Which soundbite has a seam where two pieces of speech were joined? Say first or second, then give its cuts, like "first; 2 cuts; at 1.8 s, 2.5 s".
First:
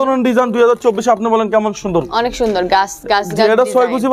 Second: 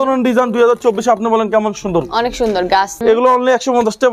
second; 1 cut; at 3.0 s